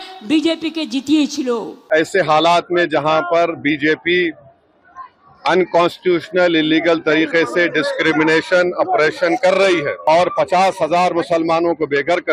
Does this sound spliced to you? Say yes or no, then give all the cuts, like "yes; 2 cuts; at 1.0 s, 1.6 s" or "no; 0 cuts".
yes; 2 cuts; at 1.9 s, 10.0 s